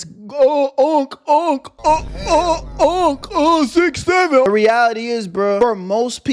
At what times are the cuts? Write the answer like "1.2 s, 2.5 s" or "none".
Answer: 4.4 s